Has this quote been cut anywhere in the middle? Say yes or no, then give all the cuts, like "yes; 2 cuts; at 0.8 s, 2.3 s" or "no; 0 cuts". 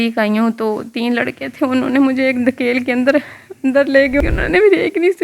yes; 1 cut; at 4.2 s